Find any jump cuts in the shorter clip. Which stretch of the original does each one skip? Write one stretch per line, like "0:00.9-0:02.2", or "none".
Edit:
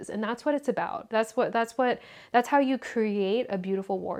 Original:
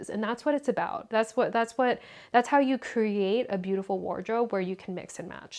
none